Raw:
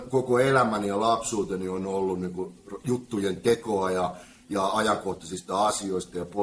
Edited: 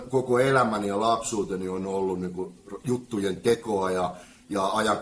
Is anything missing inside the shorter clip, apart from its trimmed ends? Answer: no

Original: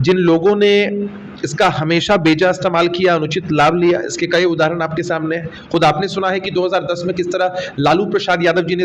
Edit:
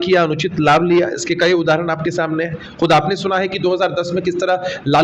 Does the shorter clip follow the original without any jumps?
yes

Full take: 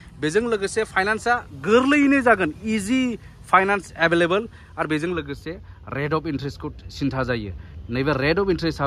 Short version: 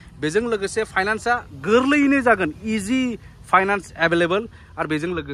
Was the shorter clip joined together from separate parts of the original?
no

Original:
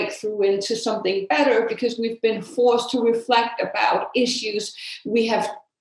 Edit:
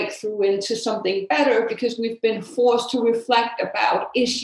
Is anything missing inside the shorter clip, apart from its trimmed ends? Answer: no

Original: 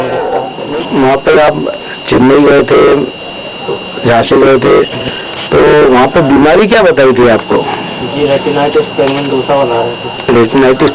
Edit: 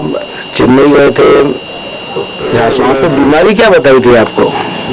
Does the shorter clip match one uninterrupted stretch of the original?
no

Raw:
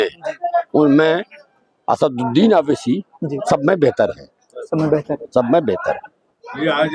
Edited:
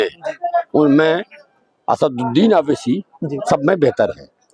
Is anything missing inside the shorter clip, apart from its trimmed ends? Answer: no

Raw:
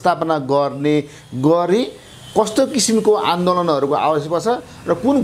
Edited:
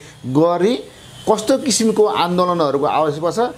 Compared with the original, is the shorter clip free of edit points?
yes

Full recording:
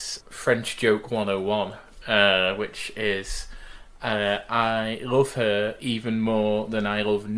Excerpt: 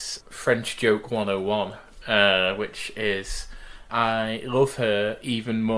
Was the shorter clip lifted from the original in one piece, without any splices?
no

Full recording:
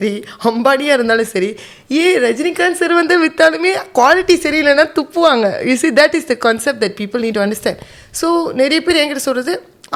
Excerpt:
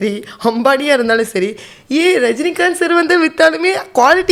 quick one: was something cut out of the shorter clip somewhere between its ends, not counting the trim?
no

